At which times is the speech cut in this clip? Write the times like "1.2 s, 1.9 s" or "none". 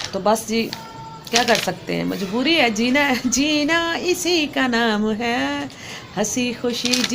none